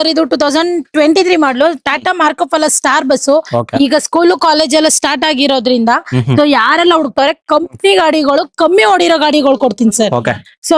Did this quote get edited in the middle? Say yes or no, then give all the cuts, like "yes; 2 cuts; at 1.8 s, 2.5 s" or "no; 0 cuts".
no; 0 cuts